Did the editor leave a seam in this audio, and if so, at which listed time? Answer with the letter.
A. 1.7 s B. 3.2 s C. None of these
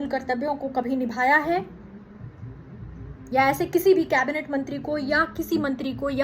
C